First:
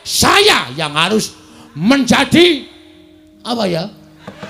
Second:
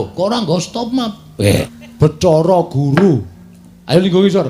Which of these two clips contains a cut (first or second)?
second